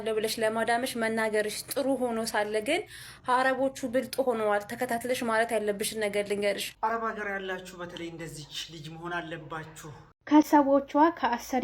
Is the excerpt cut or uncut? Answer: cut